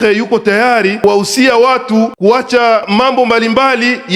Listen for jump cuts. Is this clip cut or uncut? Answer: cut